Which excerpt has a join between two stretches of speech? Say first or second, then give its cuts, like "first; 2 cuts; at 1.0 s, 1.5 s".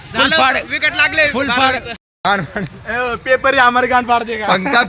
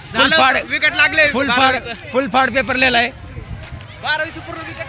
first; 1 cut; at 2.1 s